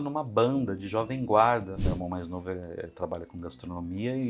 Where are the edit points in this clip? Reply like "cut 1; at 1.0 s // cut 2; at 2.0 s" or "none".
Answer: cut 1; at 1.8 s